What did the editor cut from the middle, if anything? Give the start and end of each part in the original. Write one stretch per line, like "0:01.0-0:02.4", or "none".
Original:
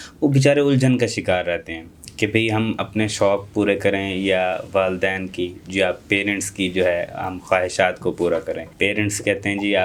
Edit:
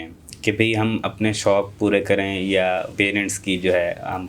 0:04.6-0:06.0